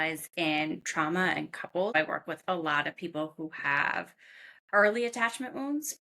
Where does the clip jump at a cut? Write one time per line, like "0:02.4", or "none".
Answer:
0:01.9